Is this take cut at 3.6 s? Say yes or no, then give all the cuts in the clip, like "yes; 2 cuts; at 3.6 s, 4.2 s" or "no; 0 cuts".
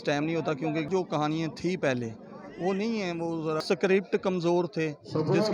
yes; 2 cuts; at 0.9 s, 3.6 s